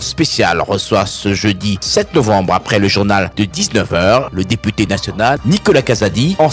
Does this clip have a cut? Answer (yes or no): no